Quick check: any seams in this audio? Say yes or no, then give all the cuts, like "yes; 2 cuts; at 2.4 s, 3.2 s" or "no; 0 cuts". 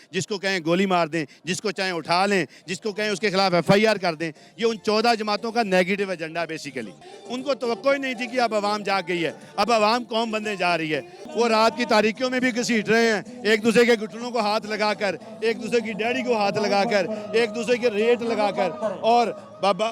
yes; 2 cuts; at 7.1 s, 11.2 s